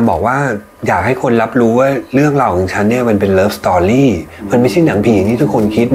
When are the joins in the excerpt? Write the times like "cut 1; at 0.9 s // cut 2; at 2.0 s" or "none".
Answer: none